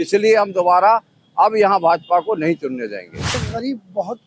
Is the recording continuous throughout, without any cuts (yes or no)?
no